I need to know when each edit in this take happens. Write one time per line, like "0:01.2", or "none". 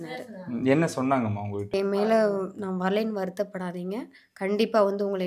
0:01.7